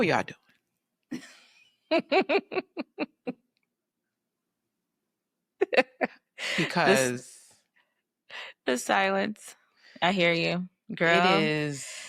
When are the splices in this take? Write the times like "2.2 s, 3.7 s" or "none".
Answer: none